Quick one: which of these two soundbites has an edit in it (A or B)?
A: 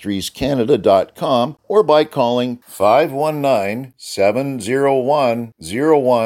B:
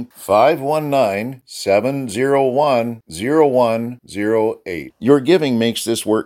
A